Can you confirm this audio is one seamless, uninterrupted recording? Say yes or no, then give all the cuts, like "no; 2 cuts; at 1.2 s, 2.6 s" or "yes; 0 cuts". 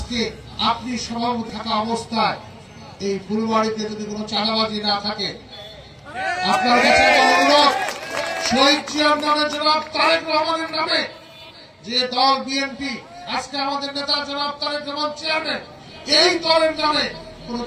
no; 1 cut; at 1.5 s